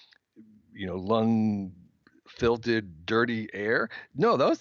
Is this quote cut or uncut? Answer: uncut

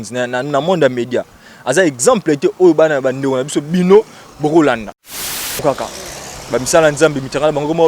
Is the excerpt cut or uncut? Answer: cut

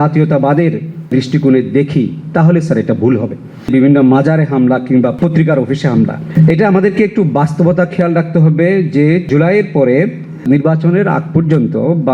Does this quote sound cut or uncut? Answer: cut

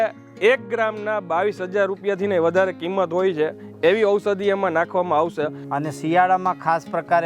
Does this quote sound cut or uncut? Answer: cut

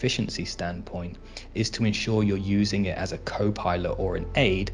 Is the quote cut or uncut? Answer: uncut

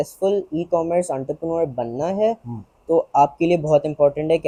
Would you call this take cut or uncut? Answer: uncut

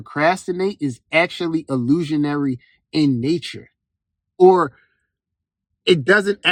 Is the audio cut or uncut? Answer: uncut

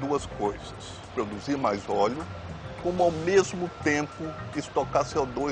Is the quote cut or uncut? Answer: cut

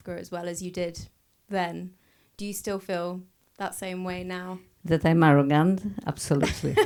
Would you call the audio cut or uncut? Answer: uncut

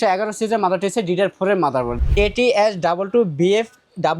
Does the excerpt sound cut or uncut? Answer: cut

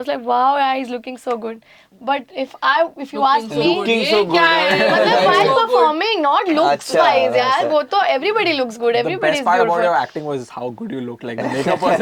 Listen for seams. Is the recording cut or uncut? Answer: uncut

